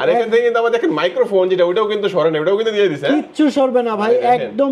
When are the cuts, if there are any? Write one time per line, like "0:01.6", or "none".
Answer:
none